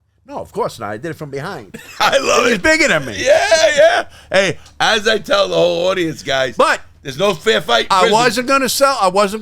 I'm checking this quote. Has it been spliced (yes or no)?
no